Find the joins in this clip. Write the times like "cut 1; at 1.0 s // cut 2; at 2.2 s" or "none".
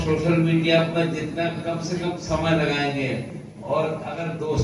cut 1; at 3.5 s